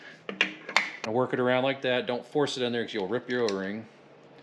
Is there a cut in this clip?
yes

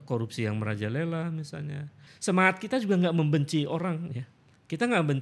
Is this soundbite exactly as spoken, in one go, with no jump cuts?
no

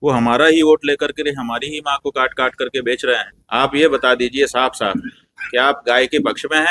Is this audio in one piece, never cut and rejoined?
no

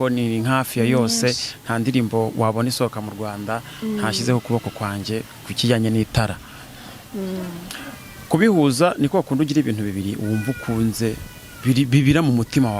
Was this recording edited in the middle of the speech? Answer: no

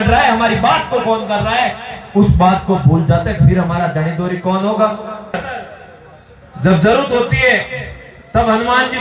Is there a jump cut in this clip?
yes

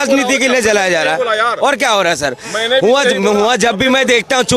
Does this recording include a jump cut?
no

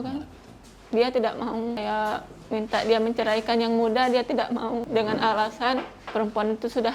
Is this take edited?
yes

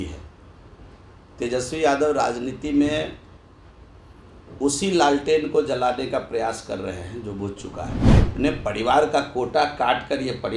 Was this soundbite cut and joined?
yes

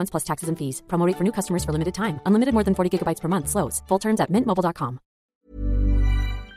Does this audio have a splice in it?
yes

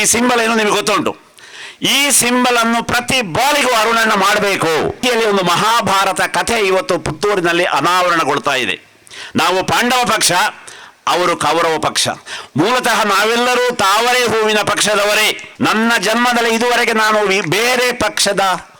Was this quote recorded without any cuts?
no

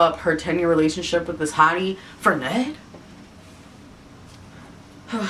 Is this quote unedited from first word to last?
yes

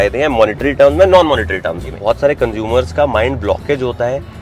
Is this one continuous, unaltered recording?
no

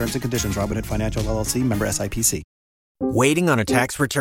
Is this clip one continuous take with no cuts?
no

